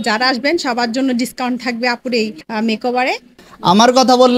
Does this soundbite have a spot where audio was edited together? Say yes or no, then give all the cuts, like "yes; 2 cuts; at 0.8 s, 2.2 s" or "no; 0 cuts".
yes; 2 cuts; at 2.4 s, 3.4 s